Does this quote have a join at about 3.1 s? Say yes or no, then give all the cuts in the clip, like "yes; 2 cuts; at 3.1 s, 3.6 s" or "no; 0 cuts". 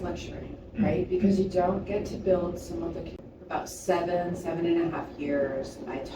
yes; 1 cut; at 3.1 s